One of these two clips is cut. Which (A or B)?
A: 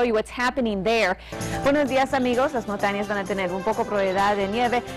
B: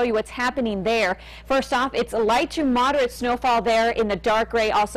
A